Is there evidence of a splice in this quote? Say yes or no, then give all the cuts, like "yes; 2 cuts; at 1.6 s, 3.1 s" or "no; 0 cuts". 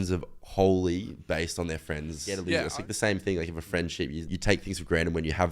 yes; 2 cuts; at 2.4 s, 4.3 s